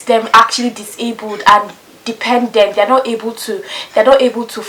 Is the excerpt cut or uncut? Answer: uncut